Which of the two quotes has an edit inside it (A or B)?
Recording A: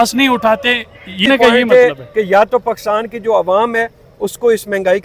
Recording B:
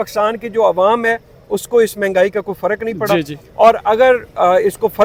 A